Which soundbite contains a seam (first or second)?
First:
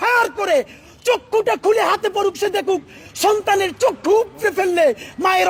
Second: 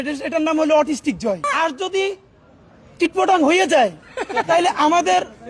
second